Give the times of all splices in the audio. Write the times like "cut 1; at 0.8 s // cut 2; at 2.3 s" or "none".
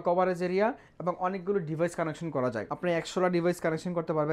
cut 1; at 2.7 s

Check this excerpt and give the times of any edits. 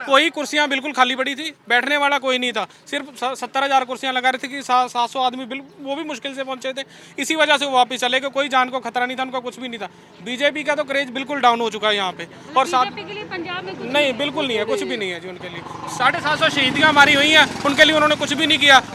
none

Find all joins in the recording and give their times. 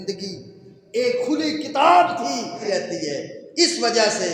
cut 1; at 2.6 s

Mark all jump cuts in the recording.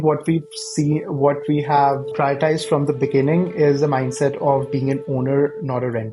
none

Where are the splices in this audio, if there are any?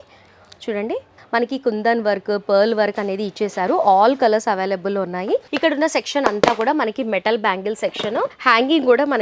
cut 1; at 1.2 s // cut 2; at 5.5 s // cut 3; at 8.3 s

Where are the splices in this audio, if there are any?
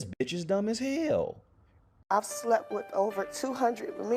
none

